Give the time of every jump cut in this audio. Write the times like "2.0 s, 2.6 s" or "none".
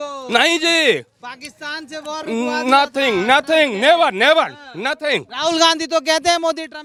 none